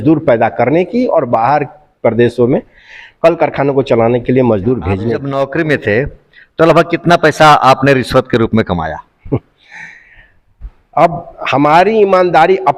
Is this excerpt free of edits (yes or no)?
no